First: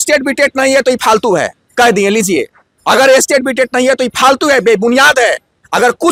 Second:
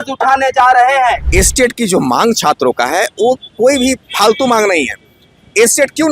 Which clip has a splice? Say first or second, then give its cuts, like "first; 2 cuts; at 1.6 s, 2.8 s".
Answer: second; 1 cut; at 1.2 s